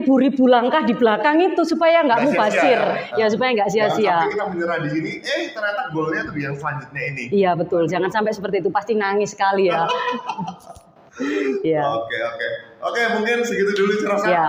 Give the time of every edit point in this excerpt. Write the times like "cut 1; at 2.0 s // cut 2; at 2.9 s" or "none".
none